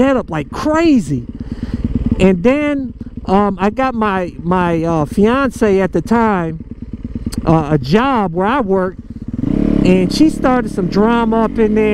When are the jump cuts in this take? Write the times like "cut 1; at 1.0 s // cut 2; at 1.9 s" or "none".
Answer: none